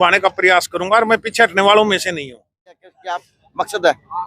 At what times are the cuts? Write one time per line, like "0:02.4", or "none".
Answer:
0:02.8